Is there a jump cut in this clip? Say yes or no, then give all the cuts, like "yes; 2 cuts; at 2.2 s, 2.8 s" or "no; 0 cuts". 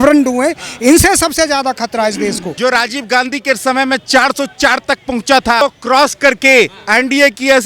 yes; 2 cuts; at 2.5 s, 5.6 s